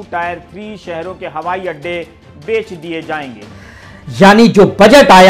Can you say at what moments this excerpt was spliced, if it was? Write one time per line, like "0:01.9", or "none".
0:03.5